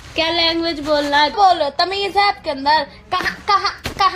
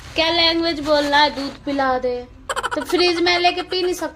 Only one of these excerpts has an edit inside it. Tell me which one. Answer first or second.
first